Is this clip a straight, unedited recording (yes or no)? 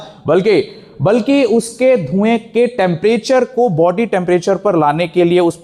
yes